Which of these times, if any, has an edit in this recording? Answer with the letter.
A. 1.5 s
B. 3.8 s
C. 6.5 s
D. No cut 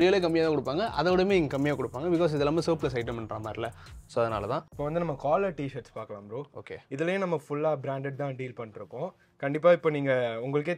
D